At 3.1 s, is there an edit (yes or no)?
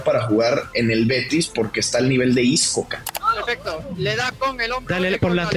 yes